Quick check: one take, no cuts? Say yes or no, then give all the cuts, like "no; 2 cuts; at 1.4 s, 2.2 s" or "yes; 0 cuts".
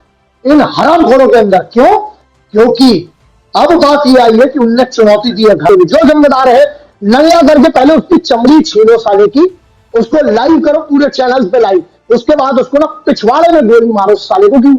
no; 1 cut; at 5.7 s